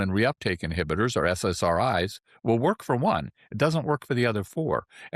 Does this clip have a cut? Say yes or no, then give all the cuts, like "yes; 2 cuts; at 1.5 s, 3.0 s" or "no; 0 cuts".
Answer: no; 0 cuts